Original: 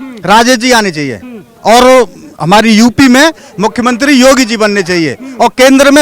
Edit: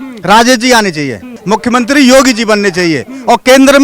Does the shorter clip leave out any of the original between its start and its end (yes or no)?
yes